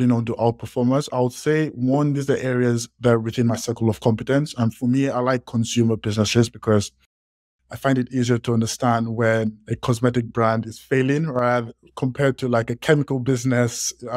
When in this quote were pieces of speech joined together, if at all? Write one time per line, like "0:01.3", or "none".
none